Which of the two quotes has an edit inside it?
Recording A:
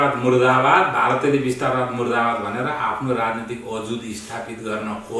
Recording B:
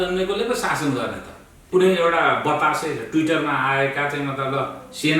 B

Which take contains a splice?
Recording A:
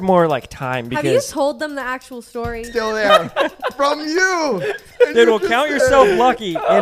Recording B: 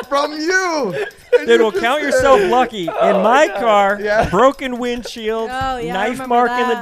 A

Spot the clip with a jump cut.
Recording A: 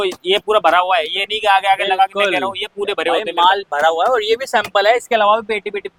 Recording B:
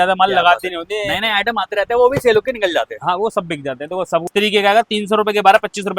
B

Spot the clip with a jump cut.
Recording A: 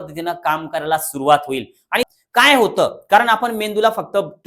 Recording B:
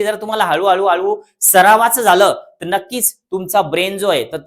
A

